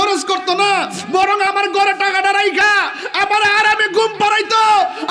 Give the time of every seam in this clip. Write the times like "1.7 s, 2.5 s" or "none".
none